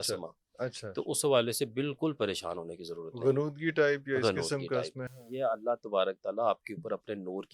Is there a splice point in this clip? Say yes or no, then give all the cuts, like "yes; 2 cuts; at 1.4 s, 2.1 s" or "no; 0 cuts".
no; 0 cuts